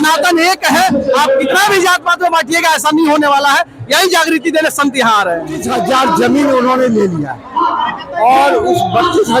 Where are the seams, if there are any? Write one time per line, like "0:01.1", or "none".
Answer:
0:05.6